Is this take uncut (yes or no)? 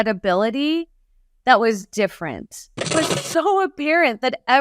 no